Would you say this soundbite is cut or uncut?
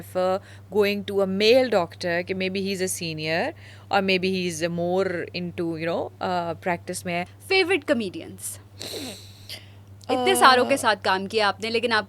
cut